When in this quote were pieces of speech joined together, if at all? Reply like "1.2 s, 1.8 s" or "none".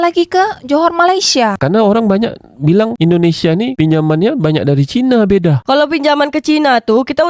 1.6 s